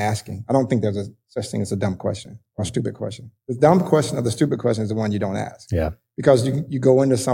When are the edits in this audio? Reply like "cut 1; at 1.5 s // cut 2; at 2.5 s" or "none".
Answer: none